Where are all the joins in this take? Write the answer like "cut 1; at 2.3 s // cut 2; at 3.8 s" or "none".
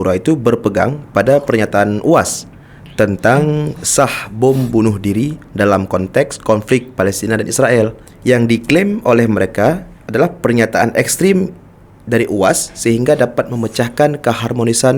cut 1; at 8.1 s // cut 2; at 9.9 s